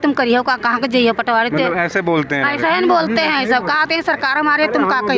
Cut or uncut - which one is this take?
uncut